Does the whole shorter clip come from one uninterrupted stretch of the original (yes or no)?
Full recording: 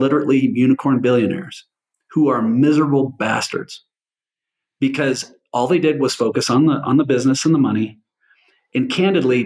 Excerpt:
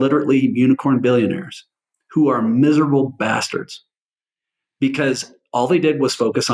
yes